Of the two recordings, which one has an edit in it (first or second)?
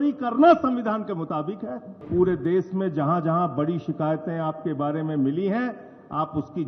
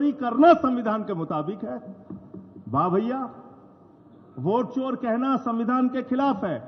first